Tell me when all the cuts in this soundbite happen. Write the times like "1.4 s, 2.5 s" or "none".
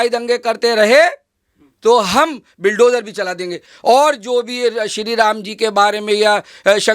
3.7 s